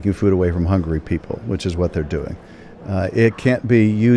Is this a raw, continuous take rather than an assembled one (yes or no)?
yes